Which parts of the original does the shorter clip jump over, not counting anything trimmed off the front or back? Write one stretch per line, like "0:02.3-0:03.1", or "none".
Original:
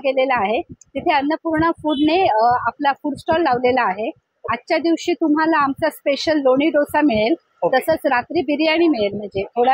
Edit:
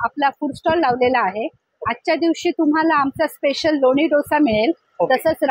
none

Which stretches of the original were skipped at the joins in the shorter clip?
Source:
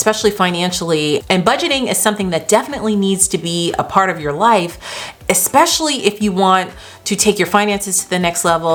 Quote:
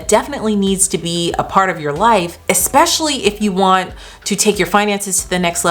0:04.7-0:05.1

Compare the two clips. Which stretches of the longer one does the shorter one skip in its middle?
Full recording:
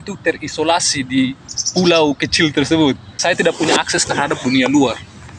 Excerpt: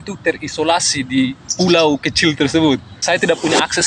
0:01.4-0:01.6

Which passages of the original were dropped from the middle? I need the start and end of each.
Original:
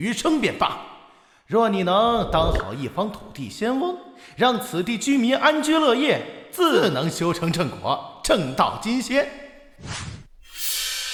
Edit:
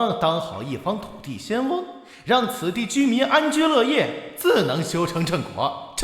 0:06.5-0:06.7

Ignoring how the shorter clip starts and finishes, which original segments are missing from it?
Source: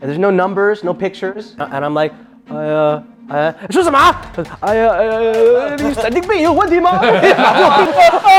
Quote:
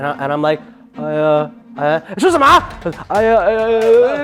none

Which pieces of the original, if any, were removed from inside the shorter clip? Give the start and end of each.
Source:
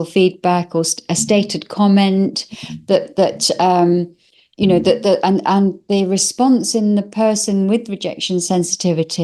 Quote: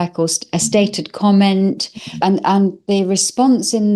0:02.8-0:05.2

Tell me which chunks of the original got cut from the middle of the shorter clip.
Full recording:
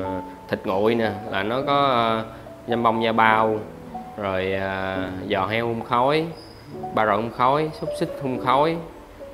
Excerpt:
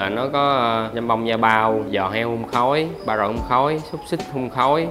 0:02.3-0:02.7
0:03.6-0:05.2
0:06.3-0:06.9

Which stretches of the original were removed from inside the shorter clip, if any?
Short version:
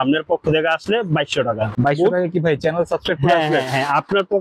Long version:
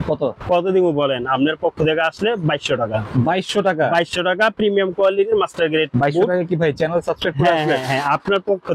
0:03.1-0:05.9

